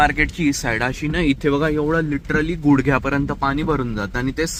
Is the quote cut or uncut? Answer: uncut